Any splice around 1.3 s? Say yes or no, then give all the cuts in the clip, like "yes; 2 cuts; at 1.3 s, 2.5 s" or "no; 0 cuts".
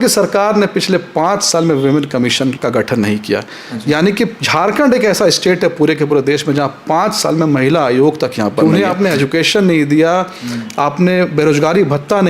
no; 2 cuts; at 2.6 s, 8.6 s